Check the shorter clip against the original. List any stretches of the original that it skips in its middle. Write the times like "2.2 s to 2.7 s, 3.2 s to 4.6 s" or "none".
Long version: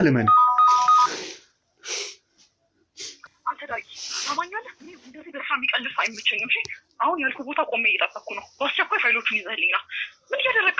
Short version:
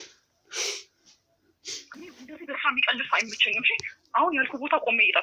3.3 s to 4.8 s